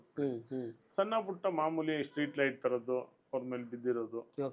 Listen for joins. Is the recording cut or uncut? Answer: uncut